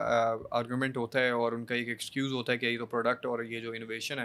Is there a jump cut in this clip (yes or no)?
no